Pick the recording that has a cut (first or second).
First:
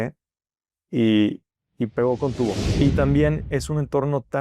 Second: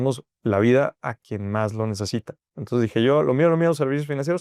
first